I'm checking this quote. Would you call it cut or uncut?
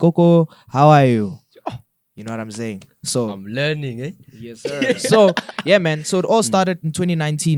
uncut